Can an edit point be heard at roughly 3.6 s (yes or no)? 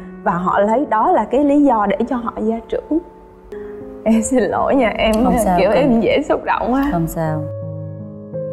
yes